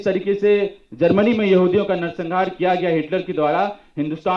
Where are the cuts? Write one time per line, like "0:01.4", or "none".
none